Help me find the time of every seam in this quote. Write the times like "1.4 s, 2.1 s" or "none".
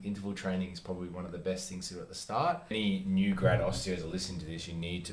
2.7 s